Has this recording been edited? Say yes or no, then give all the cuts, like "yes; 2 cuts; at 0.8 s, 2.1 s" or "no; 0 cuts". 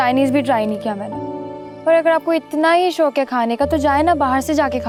no; 0 cuts